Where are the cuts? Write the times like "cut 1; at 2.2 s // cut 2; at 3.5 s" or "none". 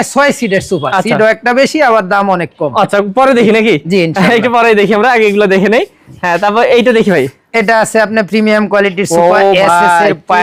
none